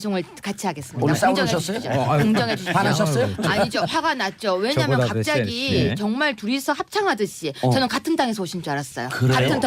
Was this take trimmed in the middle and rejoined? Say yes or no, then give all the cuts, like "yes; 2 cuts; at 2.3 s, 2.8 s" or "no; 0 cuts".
no; 0 cuts